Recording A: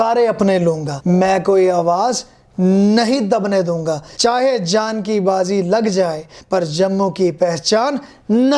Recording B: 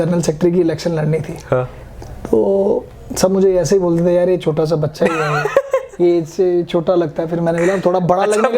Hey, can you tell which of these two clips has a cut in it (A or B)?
A